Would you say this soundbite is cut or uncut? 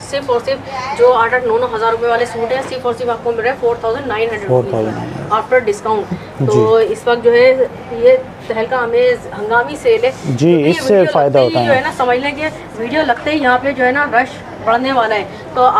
uncut